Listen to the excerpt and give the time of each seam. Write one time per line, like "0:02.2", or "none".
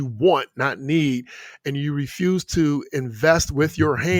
none

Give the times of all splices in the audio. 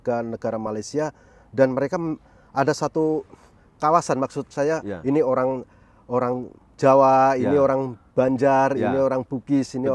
none

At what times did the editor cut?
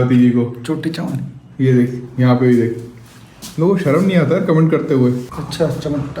0:05.2

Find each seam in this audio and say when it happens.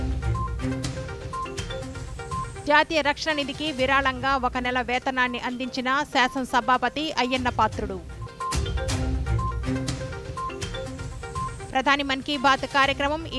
0:02.2

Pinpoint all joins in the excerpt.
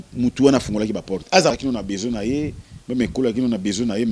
0:01.5

